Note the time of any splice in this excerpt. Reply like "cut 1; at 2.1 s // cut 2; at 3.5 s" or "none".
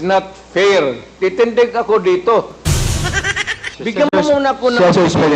cut 1; at 1.1 s